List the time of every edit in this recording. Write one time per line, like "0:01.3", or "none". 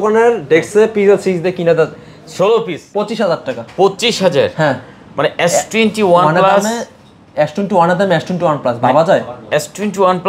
0:02.8